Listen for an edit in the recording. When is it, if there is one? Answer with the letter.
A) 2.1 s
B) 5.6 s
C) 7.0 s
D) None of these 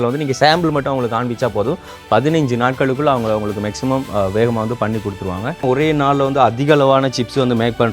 B